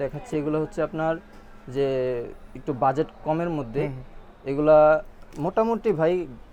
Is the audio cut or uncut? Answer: uncut